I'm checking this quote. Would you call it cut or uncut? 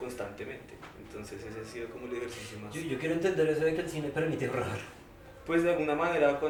uncut